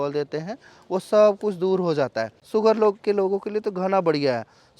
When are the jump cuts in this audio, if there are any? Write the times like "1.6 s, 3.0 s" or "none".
2.4 s